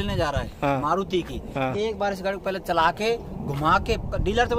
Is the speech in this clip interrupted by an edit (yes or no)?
no